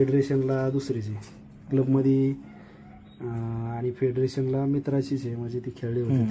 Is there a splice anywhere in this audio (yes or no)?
no